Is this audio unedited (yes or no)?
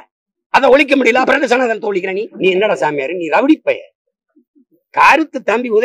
no